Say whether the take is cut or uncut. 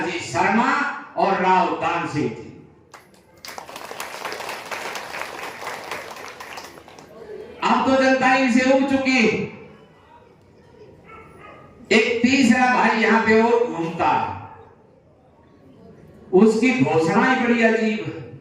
uncut